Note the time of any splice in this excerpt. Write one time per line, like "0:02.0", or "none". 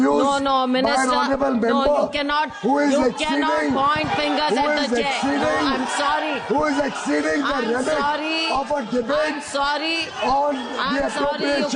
none